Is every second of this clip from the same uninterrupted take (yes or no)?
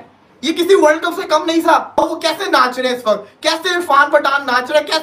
no